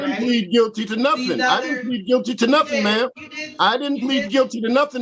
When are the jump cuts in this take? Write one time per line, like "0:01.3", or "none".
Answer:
none